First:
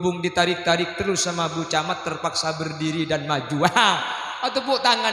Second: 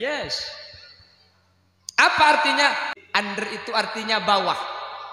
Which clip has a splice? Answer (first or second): second